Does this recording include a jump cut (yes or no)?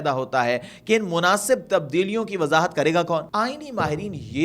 yes